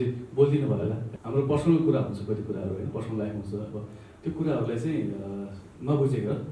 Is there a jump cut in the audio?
yes; 1 cut; at 1.1 s

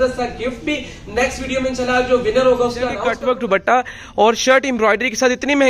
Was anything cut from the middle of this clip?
yes; 1 cut; at 3.1 s

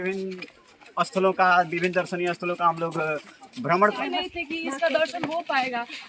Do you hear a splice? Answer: yes; 1 cut; at 4.0 s

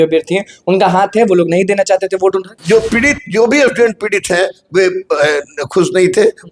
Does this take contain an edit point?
yes; 1 cut; at 2.6 s

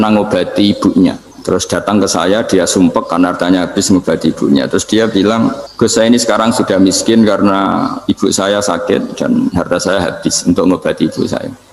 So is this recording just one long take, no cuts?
no; 2 cuts; at 1.3 s, 5.6 s

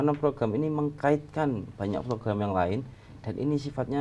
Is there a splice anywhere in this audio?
no; 0 cuts

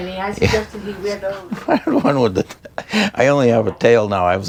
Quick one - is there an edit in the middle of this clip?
no; 0 cuts

